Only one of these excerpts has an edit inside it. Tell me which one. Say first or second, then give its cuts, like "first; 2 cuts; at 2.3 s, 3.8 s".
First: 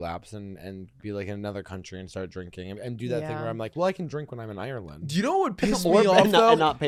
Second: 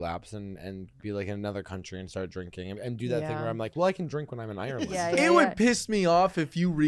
second; 1 cut; at 4.9 s